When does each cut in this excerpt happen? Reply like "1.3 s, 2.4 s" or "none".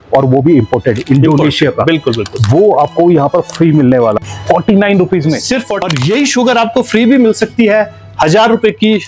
4.2 s, 5.7 s